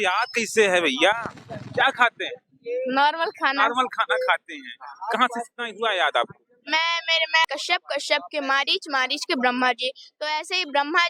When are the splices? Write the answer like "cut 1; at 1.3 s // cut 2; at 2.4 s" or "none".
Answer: cut 1; at 7.4 s